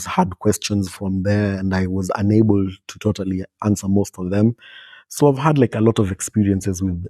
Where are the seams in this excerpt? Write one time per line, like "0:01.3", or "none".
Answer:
0:05.1